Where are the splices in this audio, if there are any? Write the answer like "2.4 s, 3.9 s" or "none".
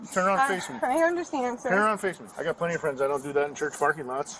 2.3 s